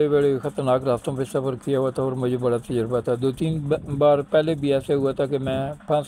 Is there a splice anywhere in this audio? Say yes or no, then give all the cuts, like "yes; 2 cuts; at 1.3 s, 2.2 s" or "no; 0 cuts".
no; 0 cuts